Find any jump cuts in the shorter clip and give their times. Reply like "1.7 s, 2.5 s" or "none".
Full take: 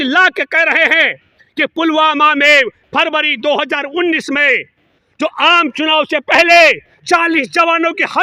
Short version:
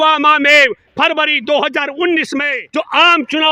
2.6 s